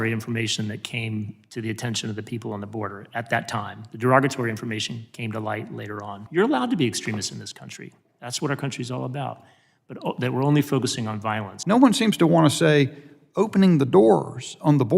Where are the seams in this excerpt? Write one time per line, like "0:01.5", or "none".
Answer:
0:06.2
0:11.5